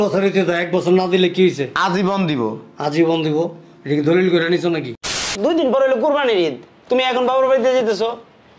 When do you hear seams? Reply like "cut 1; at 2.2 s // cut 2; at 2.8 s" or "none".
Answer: cut 1; at 5.3 s

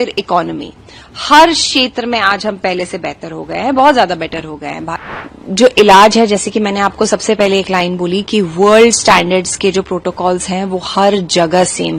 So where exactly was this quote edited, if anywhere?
cut 1; at 5.2 s

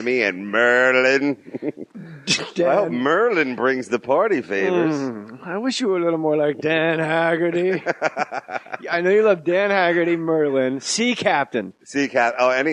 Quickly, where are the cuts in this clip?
cut 1; at 4.8 s

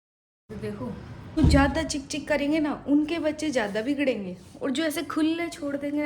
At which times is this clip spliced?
cut 1; at 1.4 s

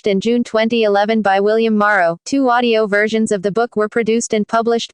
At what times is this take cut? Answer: cut 1; at 2.2 s

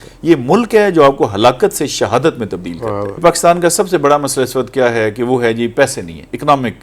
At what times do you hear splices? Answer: cut 1; at 3.2 s

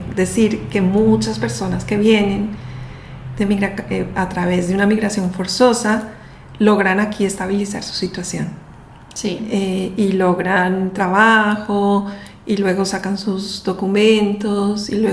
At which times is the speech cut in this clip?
none

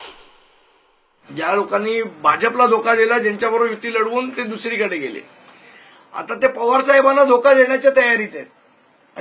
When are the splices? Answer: cut 1; at 1.0 s

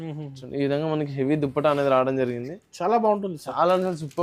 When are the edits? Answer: none

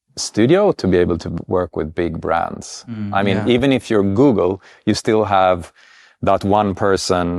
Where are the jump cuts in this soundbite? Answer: none

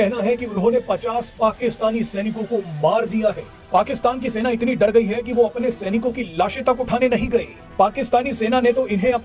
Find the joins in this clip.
none

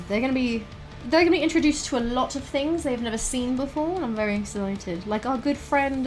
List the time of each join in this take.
cut 1; at 0.9 s

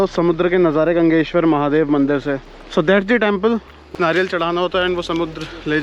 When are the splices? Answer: cut 1; at 2.5 s // cut 2; at 3.9 s

